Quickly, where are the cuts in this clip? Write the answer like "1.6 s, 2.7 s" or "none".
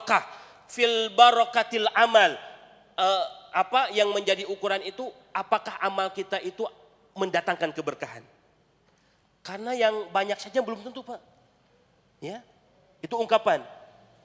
none